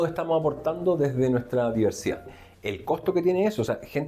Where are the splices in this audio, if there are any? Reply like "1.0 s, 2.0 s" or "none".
2.3 s